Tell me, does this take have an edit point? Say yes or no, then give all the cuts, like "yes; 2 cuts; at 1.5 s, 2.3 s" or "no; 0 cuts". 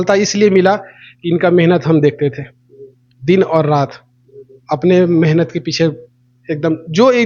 no; 0 cuts